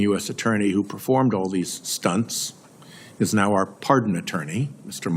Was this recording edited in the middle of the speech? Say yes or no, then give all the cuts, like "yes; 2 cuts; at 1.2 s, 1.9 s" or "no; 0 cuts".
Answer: no; 0 cuts